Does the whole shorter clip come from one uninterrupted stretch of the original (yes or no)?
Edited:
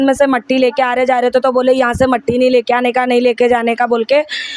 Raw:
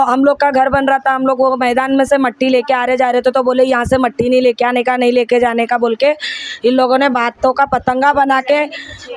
yes